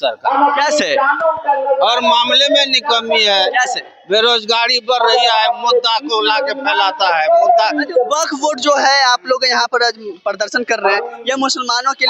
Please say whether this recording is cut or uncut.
uncut